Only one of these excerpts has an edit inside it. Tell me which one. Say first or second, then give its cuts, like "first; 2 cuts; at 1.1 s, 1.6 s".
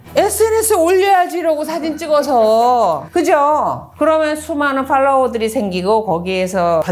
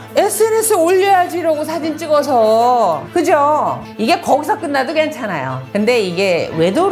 second; 1 cut; at 3.8 s